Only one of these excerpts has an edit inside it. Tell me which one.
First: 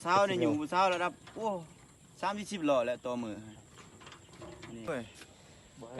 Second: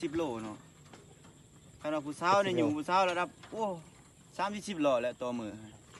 first; 1 cut; at 4.8 s

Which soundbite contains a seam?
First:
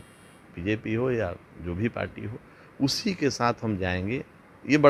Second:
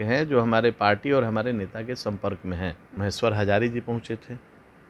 second; 1 cut; at 2.8 s

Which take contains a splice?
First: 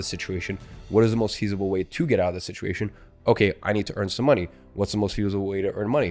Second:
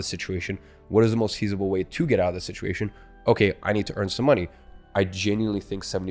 second; 1 cut; at 4.6 s

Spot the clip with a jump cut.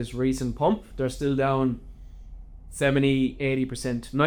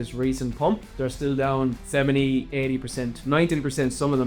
second; 1 cut; at 1.8 s

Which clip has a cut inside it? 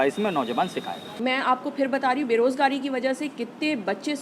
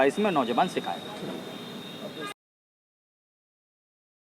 first; 1 cut; at 1.0 s

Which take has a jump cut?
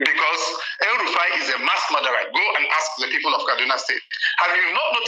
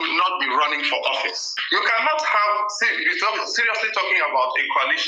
second; 1 cut; at 1.5 s

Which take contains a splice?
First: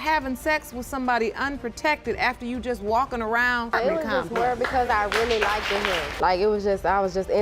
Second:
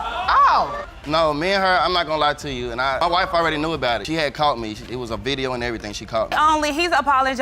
second; 2 cuts; at 0.9 s, 3.0 s

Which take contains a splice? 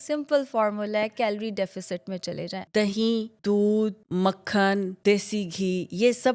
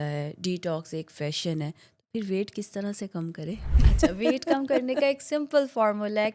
first; 4 cuts; at 2.5 s, 3.3 s, 4.0 s, 4.9 s

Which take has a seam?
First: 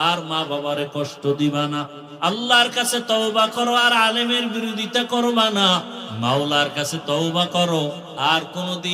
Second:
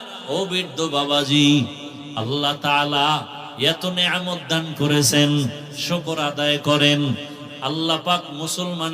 first; 2 cuts; at 2.0 s, 6.0 s

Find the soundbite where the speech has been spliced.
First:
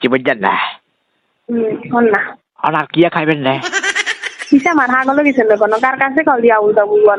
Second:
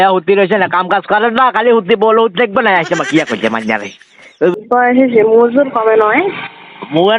second; 1 cut; at 4.5 s

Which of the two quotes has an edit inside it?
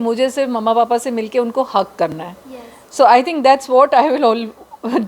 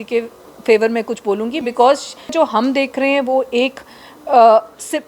second; 1 cut; at 2.3 s

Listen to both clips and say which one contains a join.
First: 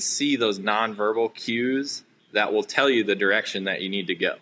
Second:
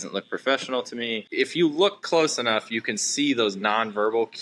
second; 1 cut; at 1.3 s

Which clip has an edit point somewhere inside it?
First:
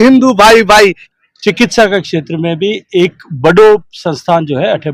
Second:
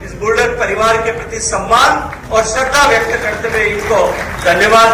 first; 1 cut; at 1.0 s

